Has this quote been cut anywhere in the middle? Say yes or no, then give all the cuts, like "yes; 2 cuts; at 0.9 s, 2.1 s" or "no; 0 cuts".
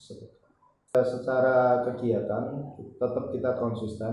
yes; 1 cut; at 0.9 s